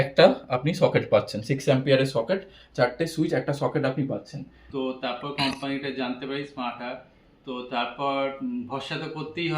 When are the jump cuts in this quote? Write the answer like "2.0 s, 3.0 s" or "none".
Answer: 4.7 s

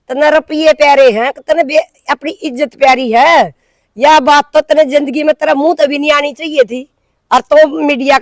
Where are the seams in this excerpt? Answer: none

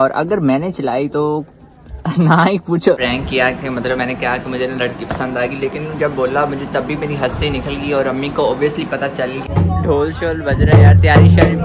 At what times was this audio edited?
3.0 s, 9.5 s

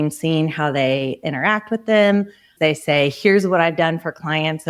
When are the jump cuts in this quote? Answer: 2.5 s

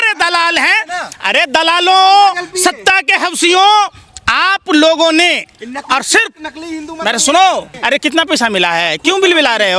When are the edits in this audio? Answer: 7.7 s

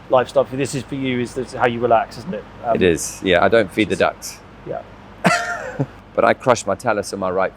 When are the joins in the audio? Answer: 6.0 s

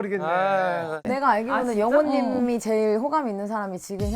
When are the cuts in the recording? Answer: 1.0 s

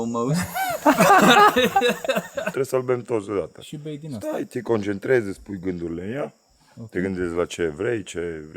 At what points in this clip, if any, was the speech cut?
2.4 s

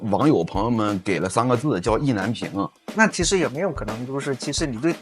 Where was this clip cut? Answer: 2.8 s

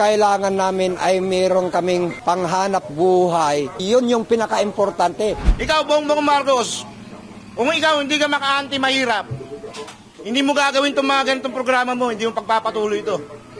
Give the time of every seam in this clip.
2.2 s, 3.8 s, 5.5 s

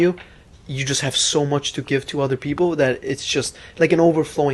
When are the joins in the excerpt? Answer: none

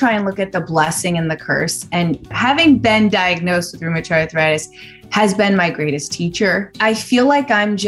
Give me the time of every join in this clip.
2.3 s, 6.7 s

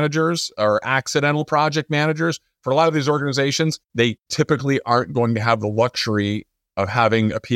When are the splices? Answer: 4.0 s

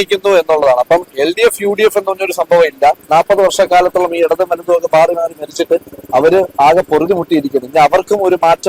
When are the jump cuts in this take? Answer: 3.0 s

